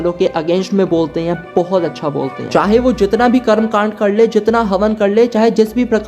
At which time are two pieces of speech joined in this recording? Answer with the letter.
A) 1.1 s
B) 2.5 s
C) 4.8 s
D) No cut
B